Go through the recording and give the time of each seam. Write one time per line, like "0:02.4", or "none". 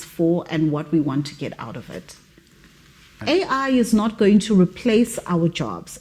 0:03.0